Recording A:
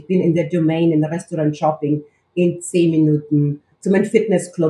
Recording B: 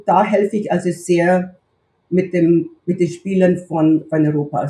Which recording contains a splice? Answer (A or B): A